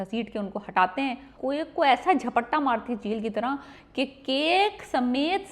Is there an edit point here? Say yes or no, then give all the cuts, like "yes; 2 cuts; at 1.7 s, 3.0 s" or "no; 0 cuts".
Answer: yes; 1 cut; at 1.3 s